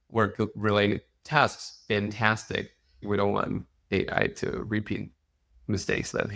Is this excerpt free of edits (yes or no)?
no